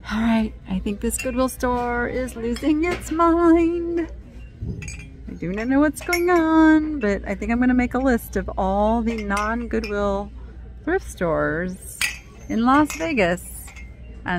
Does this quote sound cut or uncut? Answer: uncut